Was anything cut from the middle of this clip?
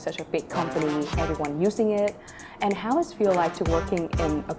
no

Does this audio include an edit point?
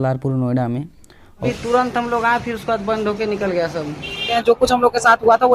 yes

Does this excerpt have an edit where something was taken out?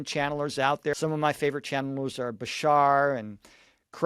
yes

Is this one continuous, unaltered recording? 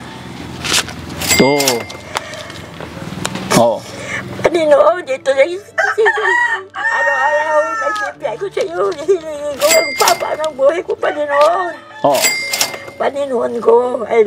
yes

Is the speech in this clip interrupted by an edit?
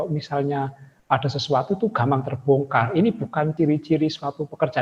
yes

